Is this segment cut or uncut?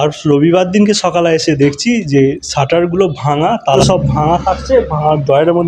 cut